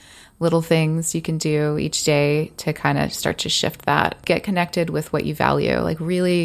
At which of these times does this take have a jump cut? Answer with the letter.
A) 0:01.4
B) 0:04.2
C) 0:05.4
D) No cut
B